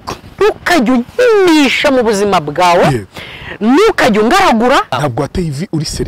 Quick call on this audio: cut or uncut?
cut